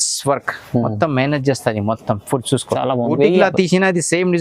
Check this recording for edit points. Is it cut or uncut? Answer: cut